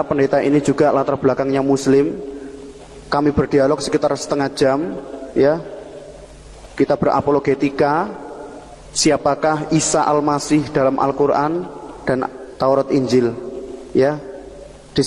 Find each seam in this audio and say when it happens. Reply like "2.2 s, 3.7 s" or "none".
none